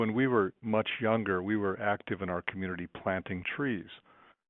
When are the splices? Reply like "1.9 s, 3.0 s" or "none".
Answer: none

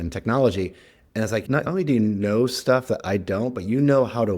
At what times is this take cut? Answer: 1.6 s

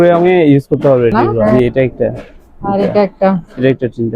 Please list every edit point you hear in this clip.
1.5 s

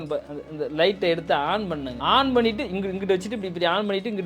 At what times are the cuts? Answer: 1.9 s

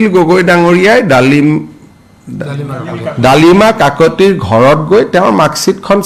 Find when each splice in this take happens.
none

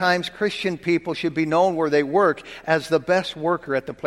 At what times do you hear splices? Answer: none

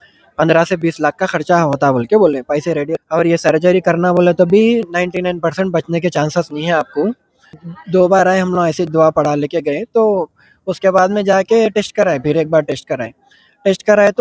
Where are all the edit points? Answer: 2.9 s, 7.6 s

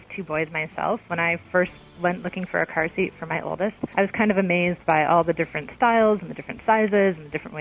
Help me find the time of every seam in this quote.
3.8 s

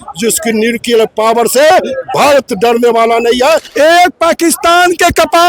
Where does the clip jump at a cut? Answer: 3.7 s

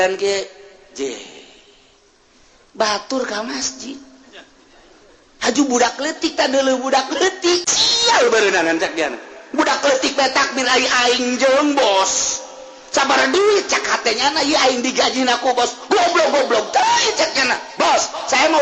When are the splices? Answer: 7.7 s

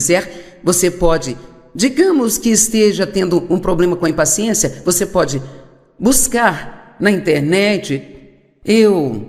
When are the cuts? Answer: none

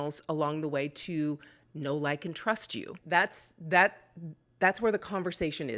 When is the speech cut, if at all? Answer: 2.9 s

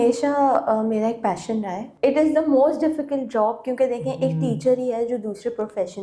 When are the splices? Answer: 1.8 s

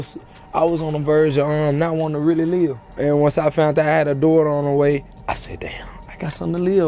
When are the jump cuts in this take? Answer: 2.9 s, 5.1 s

